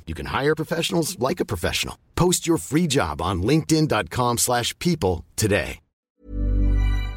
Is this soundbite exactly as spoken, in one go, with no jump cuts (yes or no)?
no